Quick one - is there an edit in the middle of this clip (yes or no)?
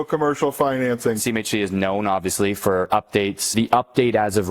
yes